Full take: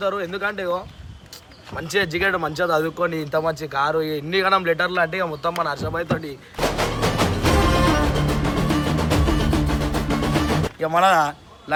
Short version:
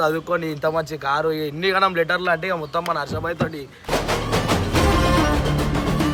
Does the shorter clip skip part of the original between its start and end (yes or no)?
no